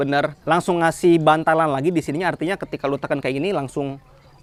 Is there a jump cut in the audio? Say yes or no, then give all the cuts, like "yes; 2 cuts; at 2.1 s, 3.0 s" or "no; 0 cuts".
no; 0 cuts